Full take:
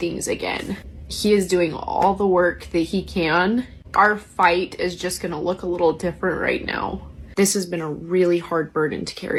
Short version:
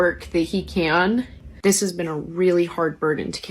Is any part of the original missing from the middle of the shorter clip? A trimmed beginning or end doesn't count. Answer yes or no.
yes